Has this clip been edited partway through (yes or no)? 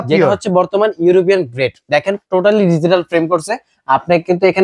no